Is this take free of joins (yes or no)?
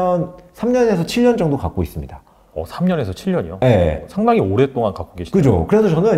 yes